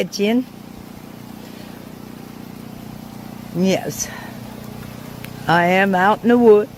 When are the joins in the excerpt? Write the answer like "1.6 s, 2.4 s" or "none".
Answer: none